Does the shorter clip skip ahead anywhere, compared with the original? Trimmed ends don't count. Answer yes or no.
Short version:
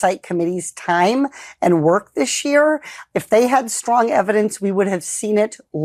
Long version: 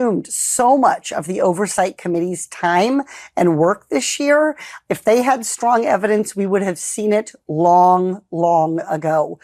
no